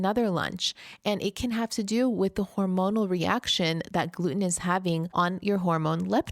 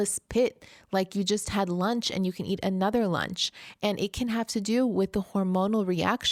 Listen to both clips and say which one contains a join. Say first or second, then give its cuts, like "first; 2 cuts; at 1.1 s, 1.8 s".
first; 1 cut; at 5.1 s